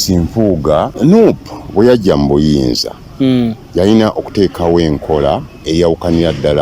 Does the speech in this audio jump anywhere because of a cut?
yes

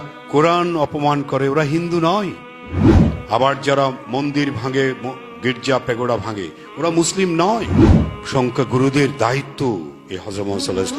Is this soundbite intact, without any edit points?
no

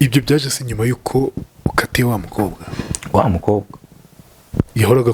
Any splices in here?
no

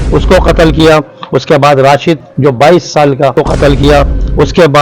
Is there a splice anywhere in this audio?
yes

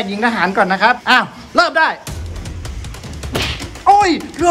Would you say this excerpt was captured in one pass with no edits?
no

